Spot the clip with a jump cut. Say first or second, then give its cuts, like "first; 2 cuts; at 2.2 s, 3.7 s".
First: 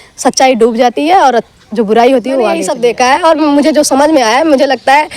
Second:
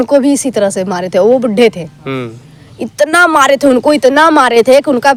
first; 1 cut; at 2.6 s